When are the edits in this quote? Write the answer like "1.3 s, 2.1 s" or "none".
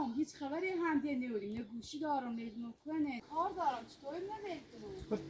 3.2 s